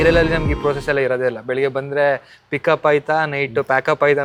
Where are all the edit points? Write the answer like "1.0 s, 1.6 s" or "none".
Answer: none